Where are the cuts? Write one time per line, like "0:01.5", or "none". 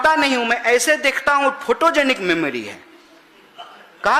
none

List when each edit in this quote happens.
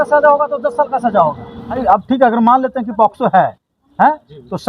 0:01.8

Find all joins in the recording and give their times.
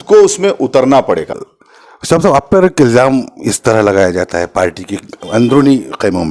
0:01.3

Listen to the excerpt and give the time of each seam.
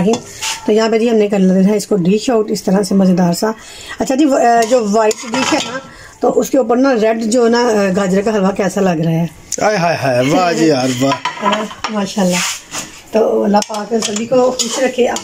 none

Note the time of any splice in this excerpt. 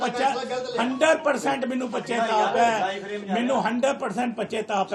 none

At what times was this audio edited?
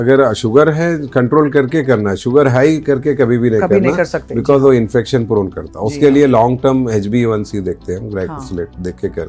none

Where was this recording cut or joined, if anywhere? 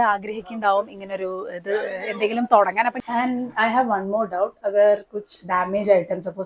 0:03.0

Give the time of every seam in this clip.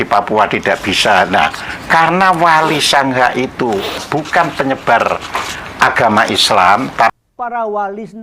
0:04.0
0:07.1

